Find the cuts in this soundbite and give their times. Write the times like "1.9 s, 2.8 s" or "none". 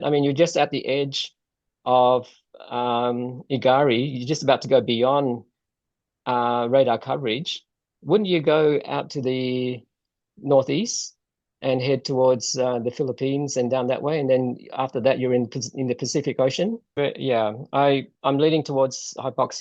16.9 s